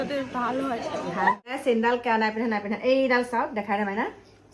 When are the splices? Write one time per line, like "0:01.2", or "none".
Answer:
0:01.5